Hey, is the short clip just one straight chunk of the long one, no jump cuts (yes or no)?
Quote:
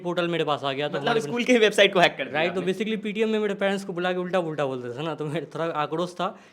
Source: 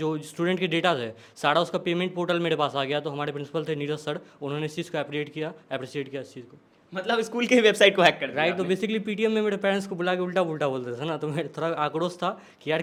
no